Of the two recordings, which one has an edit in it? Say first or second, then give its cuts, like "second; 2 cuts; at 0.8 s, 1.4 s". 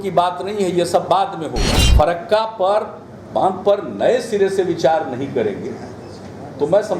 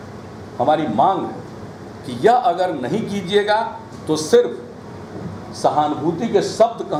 first; 1 cut; at 1.8 s